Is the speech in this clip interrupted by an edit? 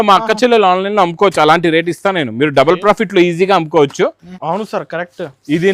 yes; 1 cut; at 4.3 s

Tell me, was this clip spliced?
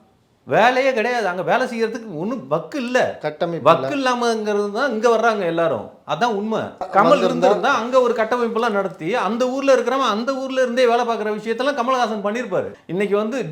yes; 2 cuts; at 6.9 s, 12.7 s

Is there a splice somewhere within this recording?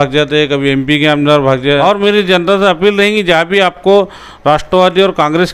yes; 1 cut; at 1.8 s

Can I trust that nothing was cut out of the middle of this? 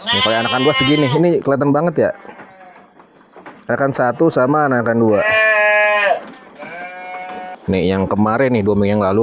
no; 1 cut; at 7.6 s

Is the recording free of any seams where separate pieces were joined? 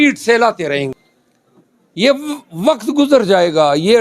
no; 1 cut; at 0.9 s

